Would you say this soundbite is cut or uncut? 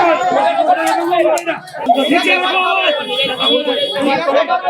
cut